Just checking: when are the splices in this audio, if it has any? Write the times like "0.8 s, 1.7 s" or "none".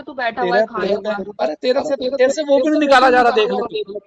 none